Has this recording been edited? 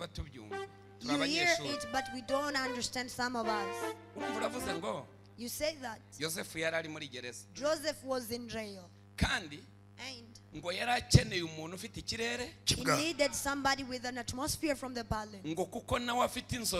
no; 0 cuts

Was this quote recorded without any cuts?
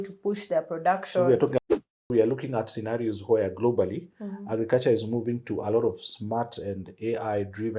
no; 1 cut; at 1.6 s

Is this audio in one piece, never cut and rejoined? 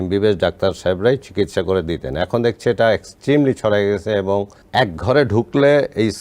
no; 1 cut; at 4.6 s

